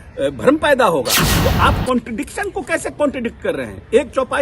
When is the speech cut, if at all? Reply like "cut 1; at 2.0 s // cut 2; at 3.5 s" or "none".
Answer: cut 1; at 1.2 s